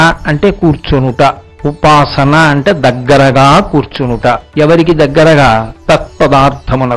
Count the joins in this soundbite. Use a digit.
0